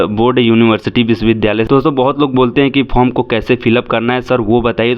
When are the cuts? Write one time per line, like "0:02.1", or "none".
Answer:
0:01.7